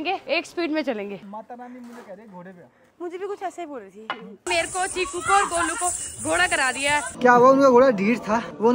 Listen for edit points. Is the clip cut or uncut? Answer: cut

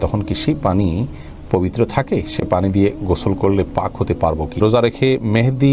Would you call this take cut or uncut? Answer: cut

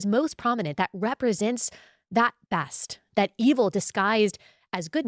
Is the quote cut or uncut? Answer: uncut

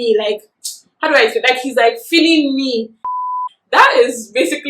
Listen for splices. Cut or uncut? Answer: cut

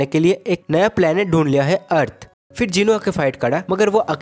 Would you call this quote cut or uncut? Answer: cut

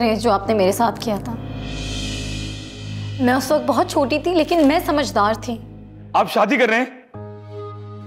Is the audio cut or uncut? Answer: cut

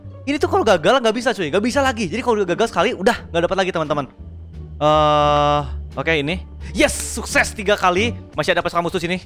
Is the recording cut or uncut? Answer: cut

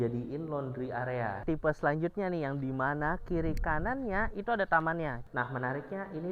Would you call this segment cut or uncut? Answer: cut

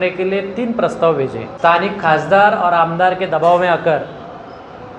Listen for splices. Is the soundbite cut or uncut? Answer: cut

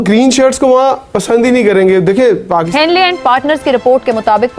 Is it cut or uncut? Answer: cut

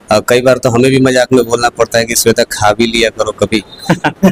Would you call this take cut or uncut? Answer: uncut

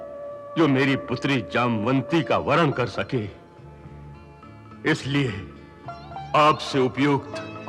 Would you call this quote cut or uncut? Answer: uncut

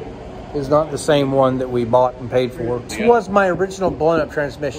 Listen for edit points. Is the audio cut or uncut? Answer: cut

